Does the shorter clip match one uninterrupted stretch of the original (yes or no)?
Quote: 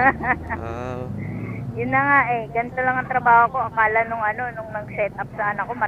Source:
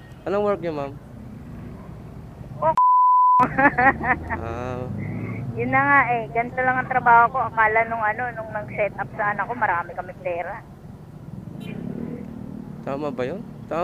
yes